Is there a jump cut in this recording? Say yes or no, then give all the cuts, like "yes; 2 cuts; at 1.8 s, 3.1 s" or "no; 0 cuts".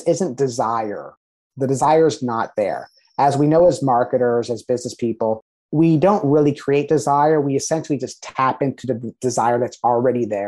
no; 0 cuts